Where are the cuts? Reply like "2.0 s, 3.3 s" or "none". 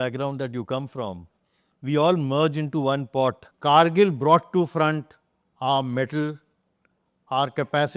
3.5 s

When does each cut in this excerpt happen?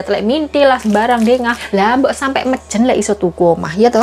1.6 s

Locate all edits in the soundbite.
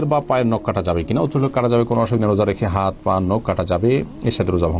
none

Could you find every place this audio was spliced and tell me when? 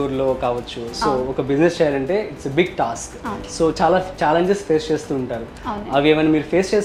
none

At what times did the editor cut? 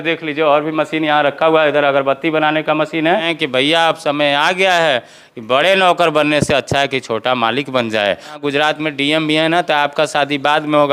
3.3 s, 8.4 s

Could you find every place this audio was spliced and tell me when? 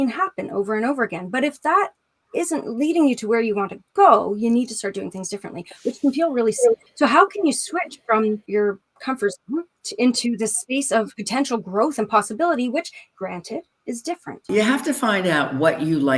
6.9 s, 8.4 s, 9.8 s, 11.2 s, 13.0 s, 14.4 s

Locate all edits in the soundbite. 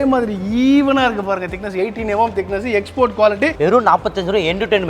3.5 s

